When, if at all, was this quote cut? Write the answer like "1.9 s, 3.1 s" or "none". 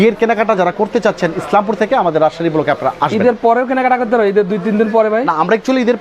none